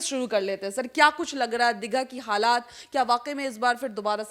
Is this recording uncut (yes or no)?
yes